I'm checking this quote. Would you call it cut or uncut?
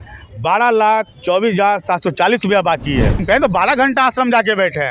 cut